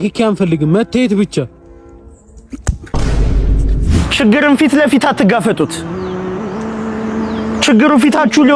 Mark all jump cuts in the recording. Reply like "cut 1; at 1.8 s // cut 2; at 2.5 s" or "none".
cut 1; at 4.0 s